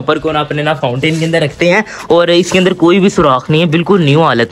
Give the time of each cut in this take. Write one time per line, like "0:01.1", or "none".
none